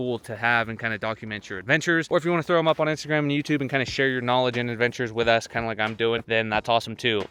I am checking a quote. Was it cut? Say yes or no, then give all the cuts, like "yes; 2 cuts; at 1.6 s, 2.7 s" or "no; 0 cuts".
no; 0 cuts